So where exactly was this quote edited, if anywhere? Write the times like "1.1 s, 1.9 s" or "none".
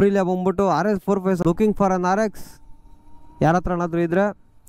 1.4 s

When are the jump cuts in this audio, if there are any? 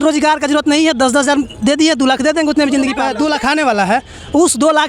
3.0 s

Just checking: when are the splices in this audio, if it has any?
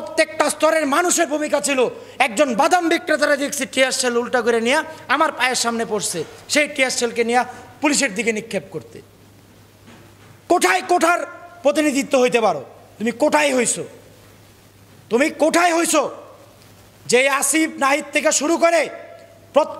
10.5 s

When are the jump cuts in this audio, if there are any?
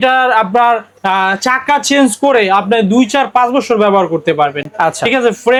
none

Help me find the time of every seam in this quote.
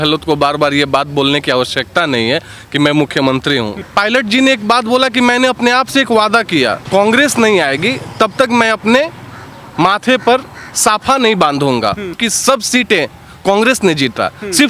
3.8 s, 6.8 s, 12.3 s

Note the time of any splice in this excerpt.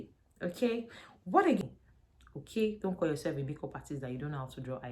1.6 s

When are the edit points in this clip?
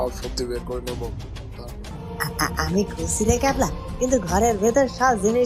1.7 s

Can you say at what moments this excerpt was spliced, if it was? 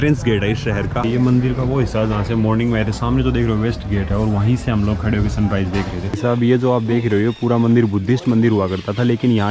1.0 s, 6.1 s

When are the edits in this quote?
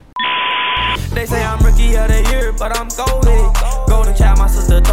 1.0 s

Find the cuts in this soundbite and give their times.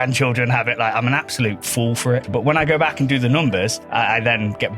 2.3 s, 3.8 s

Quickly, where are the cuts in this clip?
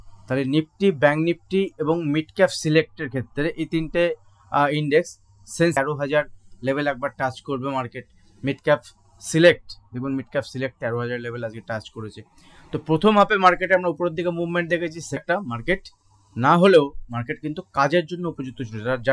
5.8 s, 15.2 s

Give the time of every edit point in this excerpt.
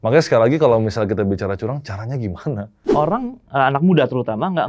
2.7 s

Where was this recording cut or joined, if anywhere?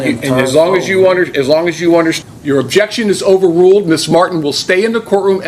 2.2 s

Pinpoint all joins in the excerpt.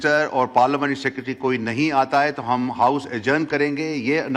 none

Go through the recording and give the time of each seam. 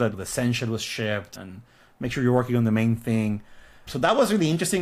none

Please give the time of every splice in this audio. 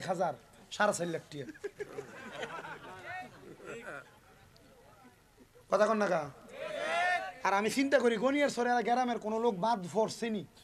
none

